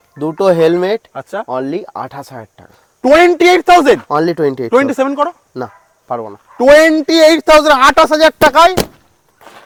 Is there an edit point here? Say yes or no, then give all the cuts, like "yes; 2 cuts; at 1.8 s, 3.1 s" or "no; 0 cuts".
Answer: no; 0 cuts